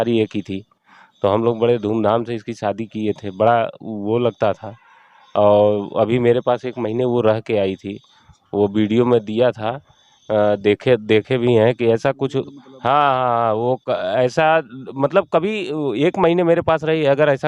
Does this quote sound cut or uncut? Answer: uncut